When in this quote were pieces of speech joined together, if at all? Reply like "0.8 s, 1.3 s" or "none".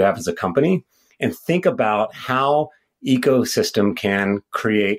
none